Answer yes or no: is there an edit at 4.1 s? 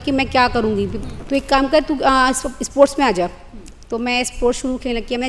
no